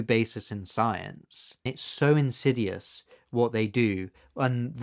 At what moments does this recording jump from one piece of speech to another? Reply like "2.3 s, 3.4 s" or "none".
1.6 s